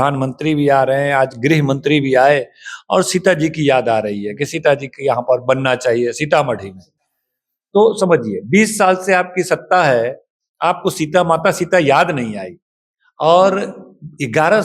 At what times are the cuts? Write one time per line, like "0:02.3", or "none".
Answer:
none

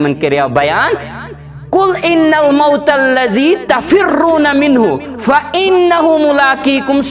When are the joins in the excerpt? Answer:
none

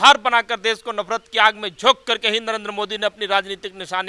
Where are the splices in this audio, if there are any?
none

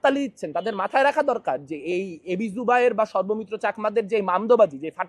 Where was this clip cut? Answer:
none

